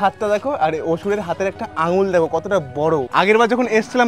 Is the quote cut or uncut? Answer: cut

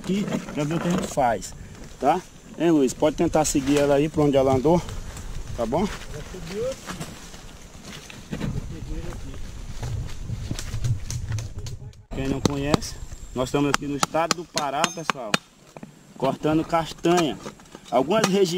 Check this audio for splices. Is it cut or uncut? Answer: cut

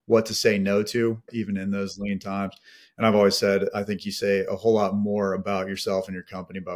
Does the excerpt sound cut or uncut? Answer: cut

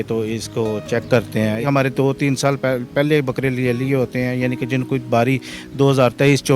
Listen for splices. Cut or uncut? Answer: cut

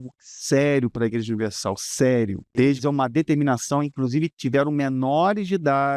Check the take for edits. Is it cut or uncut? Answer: cut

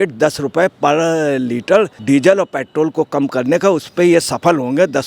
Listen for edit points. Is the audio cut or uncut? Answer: cut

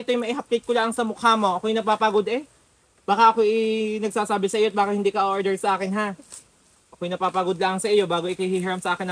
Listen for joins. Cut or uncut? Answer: uncut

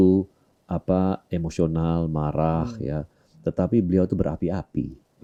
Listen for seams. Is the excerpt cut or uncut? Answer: uncut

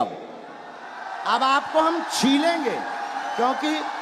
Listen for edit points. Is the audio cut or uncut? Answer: uncut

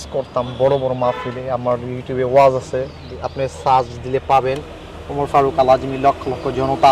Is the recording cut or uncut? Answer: uncut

